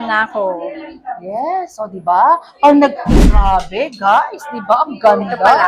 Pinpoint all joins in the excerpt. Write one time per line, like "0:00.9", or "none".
0:03.3